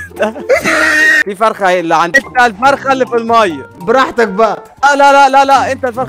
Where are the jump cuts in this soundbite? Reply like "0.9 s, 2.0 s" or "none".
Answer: 2.2 s, 3.7 s, 4.7 s